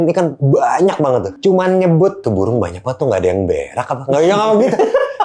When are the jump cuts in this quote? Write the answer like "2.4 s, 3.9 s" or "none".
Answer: 1.3 s, 2.2 s